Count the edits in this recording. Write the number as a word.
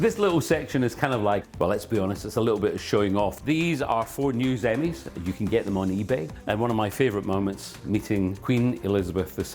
four